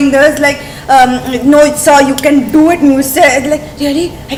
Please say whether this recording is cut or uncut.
uncut